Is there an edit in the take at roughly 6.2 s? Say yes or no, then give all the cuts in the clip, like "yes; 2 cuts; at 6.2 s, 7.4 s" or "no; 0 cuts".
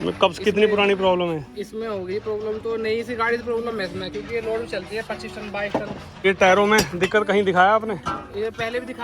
yes; 1 cut; at 6.2 s